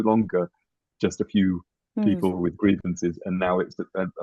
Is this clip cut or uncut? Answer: uncut